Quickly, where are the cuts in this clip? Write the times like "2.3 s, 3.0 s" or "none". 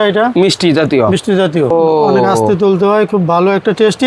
1.7 s